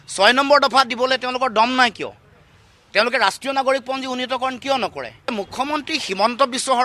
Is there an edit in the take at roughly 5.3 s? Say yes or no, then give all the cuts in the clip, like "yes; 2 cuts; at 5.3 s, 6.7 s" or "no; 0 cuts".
yes; 1 cut; at 5.3 s